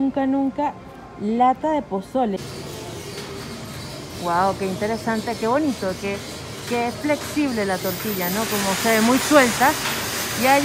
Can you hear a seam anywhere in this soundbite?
yes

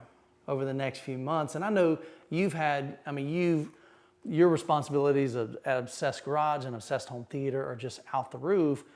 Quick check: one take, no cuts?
yes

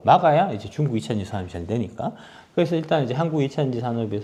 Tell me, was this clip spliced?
no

